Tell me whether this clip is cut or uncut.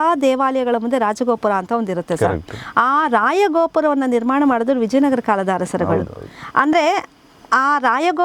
uncut